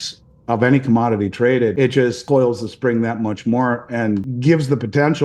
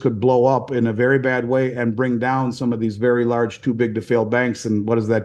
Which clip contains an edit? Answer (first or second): first